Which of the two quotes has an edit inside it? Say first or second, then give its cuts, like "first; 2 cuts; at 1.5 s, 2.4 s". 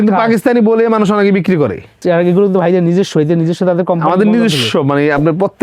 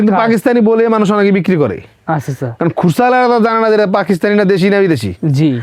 first; 1 cut; at 2.0 s